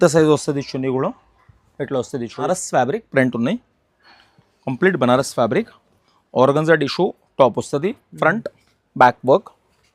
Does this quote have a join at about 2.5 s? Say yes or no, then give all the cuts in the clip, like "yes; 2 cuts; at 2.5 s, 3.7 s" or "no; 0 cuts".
yes; 1 cut; at 2.5 s